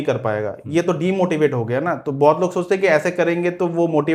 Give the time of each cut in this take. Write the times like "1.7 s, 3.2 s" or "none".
none